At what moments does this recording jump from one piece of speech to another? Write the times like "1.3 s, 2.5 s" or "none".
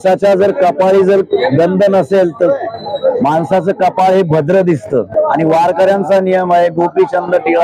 5.1 s